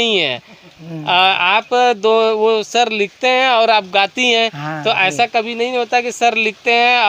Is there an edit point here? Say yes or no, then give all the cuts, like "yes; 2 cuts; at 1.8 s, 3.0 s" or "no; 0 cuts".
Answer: no; 0 cuts